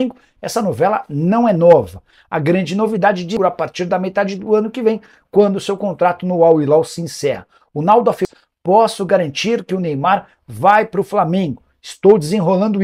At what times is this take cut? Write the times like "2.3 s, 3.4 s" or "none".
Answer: 3.4 s, 8.2 s